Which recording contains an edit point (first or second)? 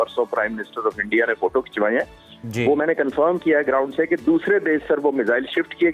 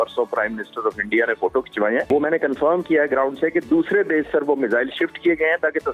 second